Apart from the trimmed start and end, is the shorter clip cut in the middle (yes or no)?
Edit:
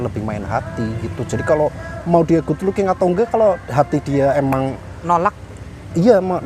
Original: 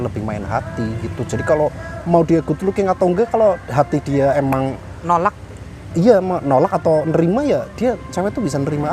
no